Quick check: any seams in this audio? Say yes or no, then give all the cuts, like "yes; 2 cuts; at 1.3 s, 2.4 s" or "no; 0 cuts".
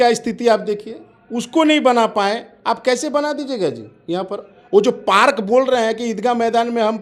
no; 0 cuts